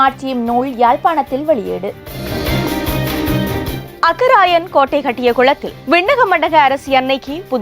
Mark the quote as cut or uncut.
cut